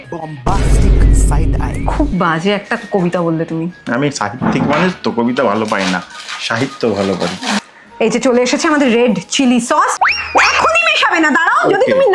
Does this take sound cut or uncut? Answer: uncut